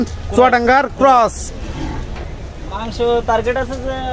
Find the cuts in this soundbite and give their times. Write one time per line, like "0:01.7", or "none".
0:02.2